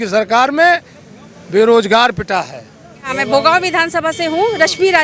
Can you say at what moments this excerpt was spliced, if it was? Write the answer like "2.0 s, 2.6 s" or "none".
3.1 s